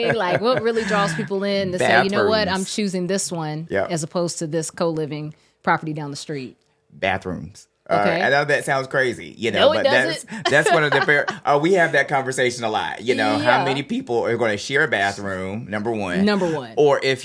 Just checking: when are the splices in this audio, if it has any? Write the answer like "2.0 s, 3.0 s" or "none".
none